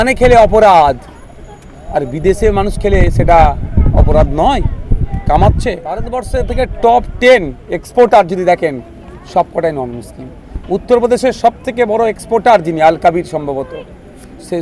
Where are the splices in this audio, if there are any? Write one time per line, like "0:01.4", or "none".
0:06.2

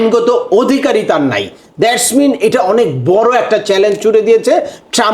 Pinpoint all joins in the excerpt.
none

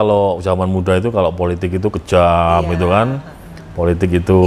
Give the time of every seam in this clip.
none

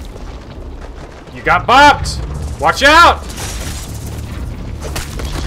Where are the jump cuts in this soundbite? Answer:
none

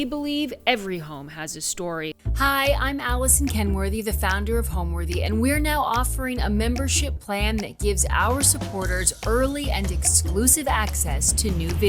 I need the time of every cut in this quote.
0:02.3

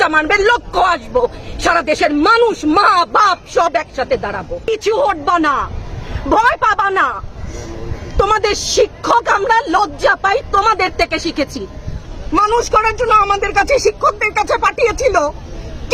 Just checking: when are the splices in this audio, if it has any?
0:04.6
0:12.0

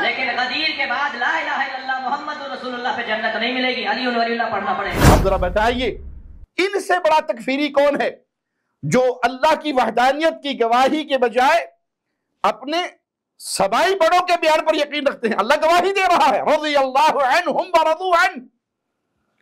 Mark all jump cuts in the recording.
0:04.9

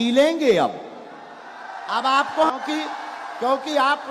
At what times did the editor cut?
0:02.5

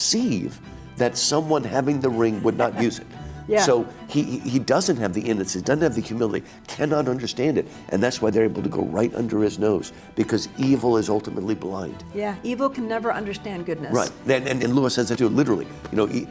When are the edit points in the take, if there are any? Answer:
none

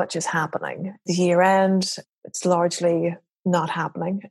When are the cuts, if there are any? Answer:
0:01.0
0:02.0

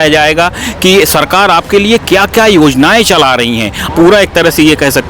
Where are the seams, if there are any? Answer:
0:03.9

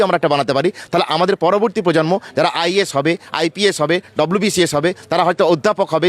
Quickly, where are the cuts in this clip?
none

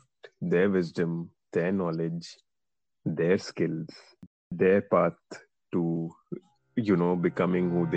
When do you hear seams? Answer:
0:04.5

